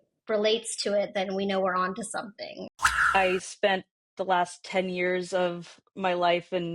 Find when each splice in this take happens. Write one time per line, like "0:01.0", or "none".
0:02.7